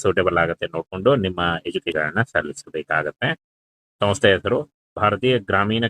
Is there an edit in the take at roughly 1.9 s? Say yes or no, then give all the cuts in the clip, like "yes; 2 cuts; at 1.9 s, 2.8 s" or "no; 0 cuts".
yes; 1 cut; at 1.9 s